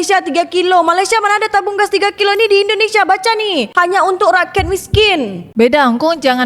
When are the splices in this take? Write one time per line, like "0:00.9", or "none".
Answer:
0:05.5